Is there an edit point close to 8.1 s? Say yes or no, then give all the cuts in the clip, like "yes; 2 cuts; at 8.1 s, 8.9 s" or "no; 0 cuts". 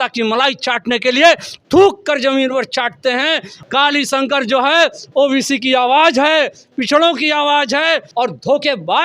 yes; 2 cuts; at 3.5 s, 8.1 s